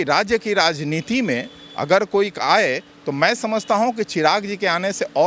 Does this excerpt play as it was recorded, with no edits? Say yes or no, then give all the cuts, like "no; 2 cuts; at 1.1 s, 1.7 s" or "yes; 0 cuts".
yes; 0 cuts